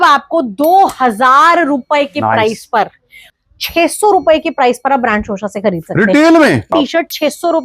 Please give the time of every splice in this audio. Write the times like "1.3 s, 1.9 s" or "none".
3.3 s, 6.7 s